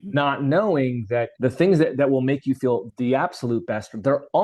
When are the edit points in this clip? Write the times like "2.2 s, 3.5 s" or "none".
1.3 s, 2.9 s